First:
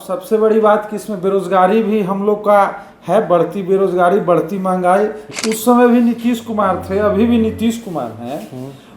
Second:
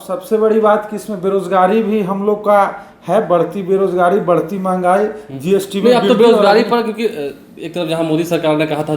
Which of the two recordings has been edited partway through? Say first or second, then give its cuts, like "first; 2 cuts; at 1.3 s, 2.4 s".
first; 1 cut; at 5.3 s